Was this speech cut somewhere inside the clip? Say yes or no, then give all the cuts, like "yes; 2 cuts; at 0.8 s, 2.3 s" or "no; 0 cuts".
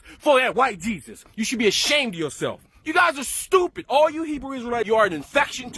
yes; 2 cuts; at 2.7 s, 4.9 s